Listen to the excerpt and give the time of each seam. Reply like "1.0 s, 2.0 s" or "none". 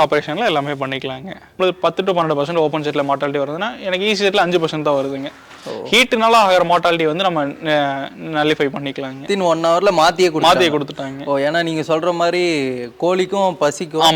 1.5 s, 9.2 s